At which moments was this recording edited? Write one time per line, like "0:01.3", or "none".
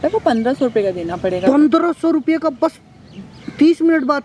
none